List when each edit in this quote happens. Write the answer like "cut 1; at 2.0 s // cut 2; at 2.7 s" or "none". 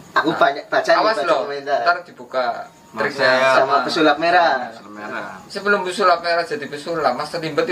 none